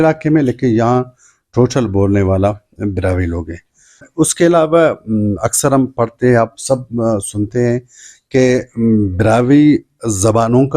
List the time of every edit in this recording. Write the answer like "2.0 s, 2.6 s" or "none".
4.0 s